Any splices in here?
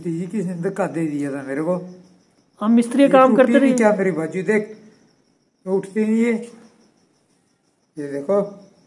no; 0 cuts

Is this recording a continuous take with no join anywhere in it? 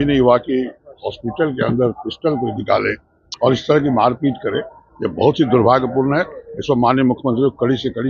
yes; 0 cuts

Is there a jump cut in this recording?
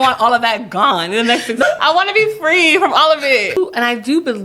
yes; 2 cuts; at 1.6 s, 3.6 s

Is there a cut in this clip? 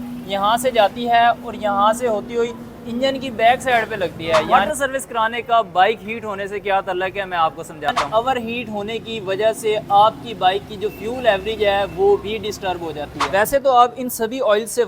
yes; 3 cuts; at 4.5 s, 8.1 s, 13.2 s

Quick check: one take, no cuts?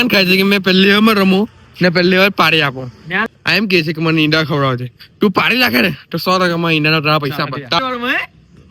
no; 2 cuts; at 3.2 s, 7.8 s

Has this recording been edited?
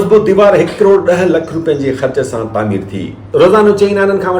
yes; 1 cut; at 3.1 s

